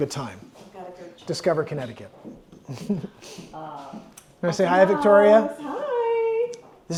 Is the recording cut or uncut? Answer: uncut